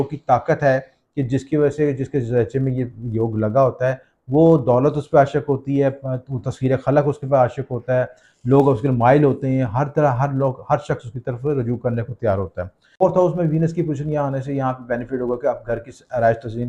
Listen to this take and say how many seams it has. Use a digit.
1